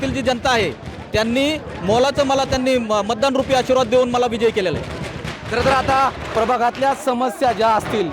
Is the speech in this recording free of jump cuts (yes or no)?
yes